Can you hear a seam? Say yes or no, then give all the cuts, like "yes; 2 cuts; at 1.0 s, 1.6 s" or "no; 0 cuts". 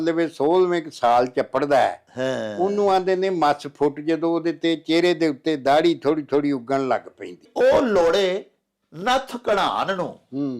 yes; 1 cut; at 7.5 s